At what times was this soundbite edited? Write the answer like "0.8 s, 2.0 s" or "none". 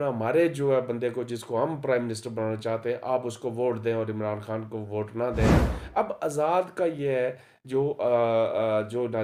none

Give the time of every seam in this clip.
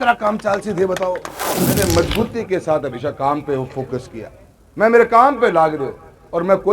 1.7 s

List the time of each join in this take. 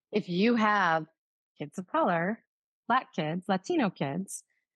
none

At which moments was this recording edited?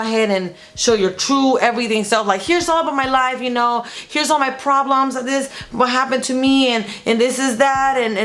none

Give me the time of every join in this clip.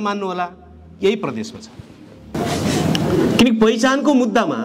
2.3 s

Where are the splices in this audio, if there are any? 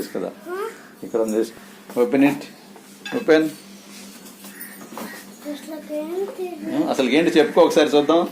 1.5 s, 5.1 s

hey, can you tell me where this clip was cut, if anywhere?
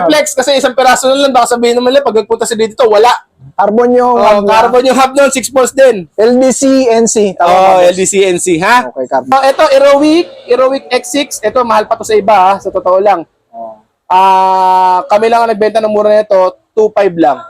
9.3 s

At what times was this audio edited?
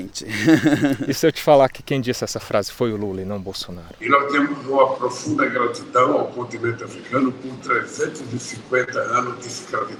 none

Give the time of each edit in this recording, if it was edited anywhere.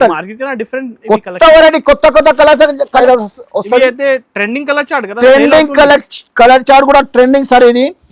3.0 s

